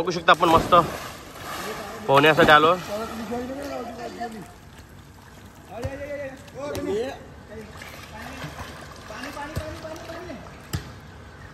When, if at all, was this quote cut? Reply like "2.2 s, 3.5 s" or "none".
none